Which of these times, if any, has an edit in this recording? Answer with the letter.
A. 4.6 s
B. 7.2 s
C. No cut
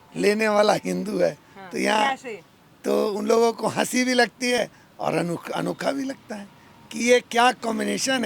C